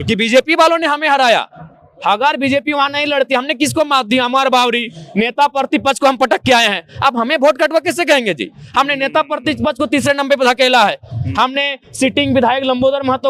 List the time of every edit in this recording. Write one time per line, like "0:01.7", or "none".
none